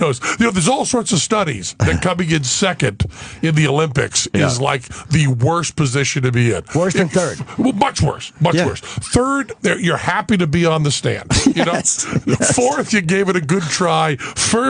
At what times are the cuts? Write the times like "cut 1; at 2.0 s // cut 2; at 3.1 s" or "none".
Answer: cut 1; at 7.4 s